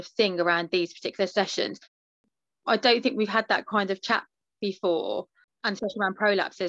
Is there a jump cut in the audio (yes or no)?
yes